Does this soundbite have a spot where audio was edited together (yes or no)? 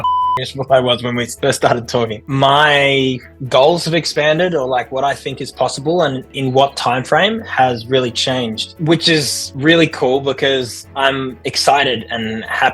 yes